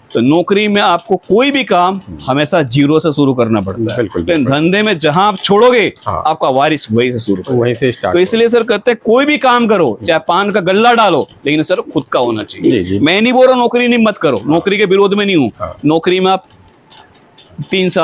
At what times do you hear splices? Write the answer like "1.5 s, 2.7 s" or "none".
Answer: none